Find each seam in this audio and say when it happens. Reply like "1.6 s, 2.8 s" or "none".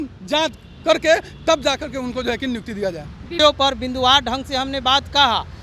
3.3 s

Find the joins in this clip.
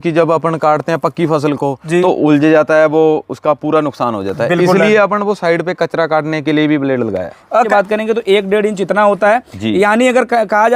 7.7 s

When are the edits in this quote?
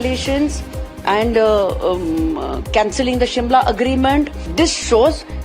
4.5 s

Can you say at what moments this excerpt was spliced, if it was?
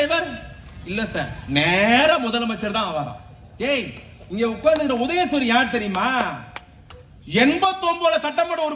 none

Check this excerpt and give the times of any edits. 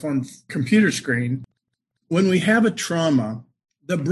1.6 s

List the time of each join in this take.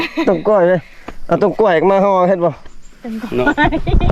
none

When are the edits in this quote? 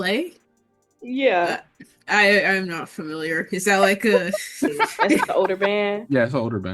5.3 s

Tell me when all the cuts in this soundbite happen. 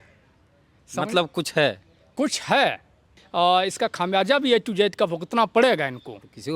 3.1 s

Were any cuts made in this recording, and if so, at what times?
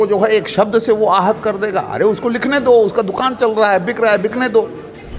none

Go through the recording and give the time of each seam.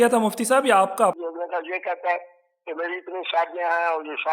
1.2 s

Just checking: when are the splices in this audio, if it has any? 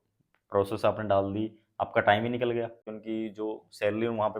2.9 s

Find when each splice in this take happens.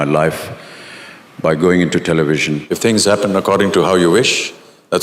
2.7 s

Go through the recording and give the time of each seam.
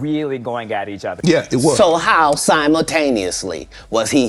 1.2 s

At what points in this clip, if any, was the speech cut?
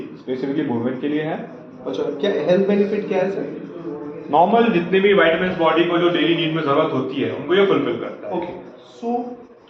none

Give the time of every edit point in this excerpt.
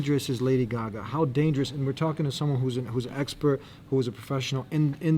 none

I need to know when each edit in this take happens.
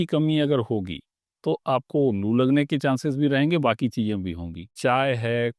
4.6 s

